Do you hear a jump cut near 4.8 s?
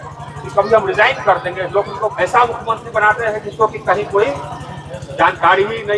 no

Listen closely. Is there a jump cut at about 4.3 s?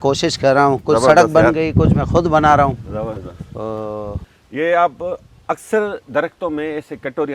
yes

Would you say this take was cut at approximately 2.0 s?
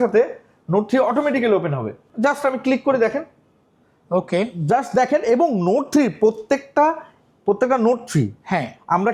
no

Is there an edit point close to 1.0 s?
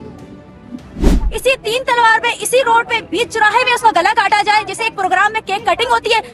yes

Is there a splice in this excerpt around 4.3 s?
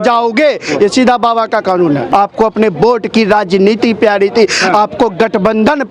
no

